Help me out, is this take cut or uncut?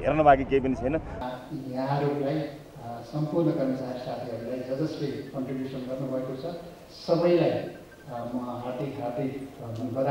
cut